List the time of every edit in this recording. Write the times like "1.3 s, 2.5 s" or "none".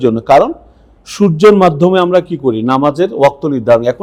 none